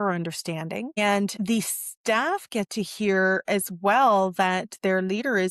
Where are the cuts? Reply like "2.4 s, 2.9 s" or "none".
none